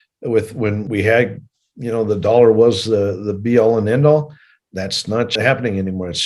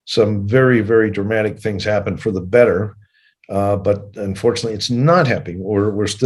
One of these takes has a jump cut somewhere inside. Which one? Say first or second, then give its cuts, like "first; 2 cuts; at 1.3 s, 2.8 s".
first; 2 cuts; at 0.8 s, 5.4 s